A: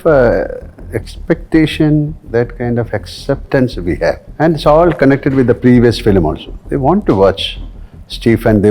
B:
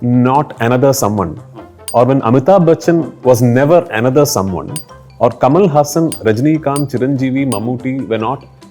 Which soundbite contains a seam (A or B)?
A